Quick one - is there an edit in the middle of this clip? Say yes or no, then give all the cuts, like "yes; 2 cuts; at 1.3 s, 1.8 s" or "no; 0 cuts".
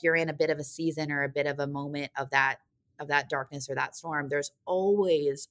no; 0 cuts